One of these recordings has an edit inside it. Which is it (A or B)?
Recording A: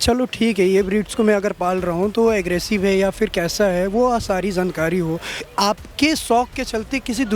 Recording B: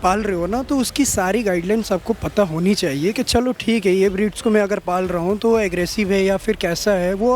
A